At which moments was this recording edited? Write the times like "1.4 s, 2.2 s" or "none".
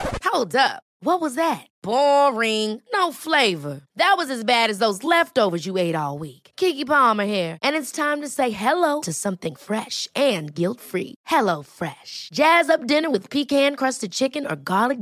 none